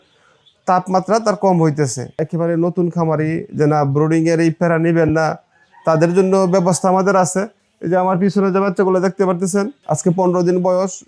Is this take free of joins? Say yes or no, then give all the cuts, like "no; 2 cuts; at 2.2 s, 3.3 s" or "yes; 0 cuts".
no; 1 cut; at 2.3 s